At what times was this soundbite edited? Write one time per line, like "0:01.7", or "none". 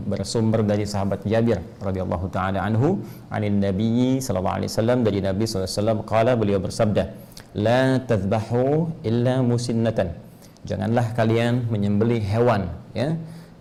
none